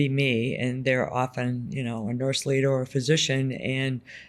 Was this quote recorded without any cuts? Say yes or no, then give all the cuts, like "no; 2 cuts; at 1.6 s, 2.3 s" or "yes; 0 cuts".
yes; 0 cuts